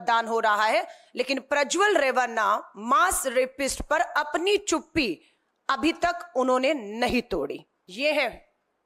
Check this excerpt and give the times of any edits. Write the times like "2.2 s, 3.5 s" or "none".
7.8 s